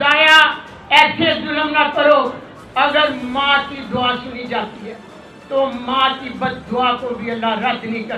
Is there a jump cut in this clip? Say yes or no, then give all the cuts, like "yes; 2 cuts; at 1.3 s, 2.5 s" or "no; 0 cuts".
no; 0 cuts